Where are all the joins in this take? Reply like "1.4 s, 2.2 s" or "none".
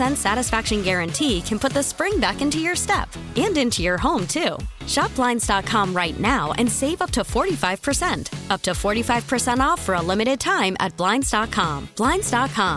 none